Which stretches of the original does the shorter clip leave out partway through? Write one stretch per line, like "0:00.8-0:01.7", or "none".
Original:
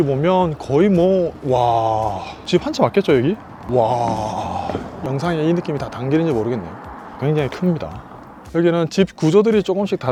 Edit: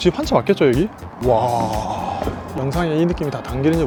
none